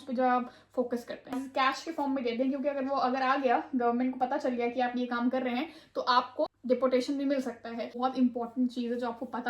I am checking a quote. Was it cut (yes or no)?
yes